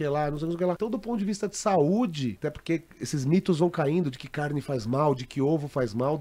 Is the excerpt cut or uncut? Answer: cut